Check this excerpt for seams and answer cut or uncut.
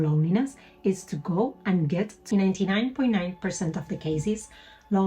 cut